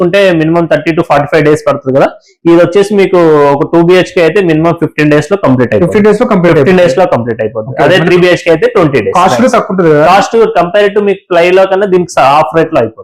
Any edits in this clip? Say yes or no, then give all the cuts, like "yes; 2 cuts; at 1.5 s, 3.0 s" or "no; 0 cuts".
no; 0 cuts